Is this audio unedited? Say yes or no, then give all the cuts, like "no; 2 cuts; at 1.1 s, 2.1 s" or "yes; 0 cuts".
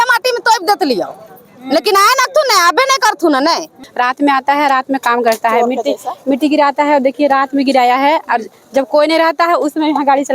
no; 1 cut; at 3.8 s